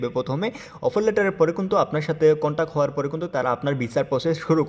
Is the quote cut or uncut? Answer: uncut